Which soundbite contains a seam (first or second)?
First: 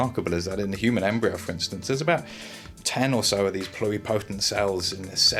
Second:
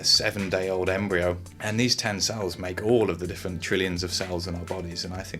second